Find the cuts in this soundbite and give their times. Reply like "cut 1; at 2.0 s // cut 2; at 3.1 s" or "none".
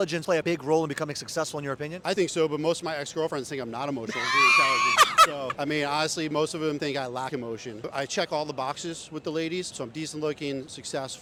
none